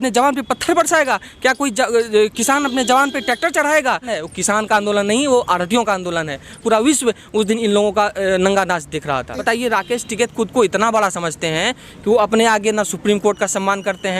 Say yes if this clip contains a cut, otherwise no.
yes